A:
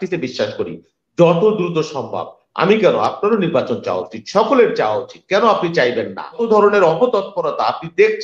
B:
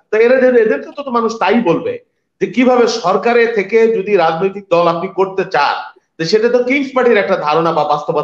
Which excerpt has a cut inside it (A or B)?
A